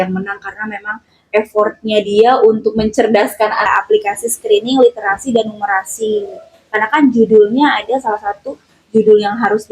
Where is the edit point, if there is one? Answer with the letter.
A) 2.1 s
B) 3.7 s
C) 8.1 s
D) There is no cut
B